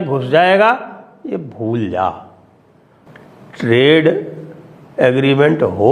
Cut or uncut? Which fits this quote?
uncut